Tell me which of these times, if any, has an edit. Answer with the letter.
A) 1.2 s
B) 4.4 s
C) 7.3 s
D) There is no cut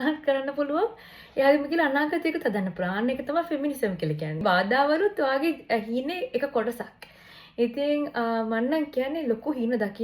B